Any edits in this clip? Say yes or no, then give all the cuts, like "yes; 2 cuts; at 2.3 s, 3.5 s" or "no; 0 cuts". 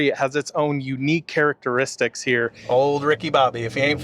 yes; 1 cut; at 2.6 s